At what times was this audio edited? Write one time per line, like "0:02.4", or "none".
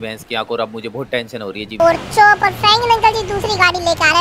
0:01.7